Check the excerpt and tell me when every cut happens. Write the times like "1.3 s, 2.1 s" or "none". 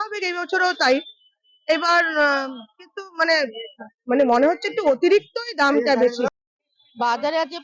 6.3 s